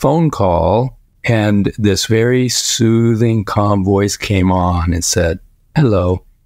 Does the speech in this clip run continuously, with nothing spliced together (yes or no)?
no